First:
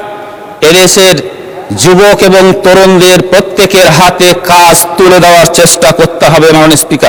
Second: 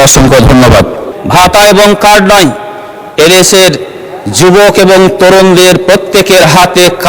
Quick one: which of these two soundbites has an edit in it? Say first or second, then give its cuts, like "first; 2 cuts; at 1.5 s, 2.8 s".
second; 1 cut; at 1.0 s